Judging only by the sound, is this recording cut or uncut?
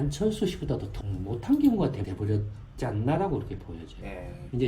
cut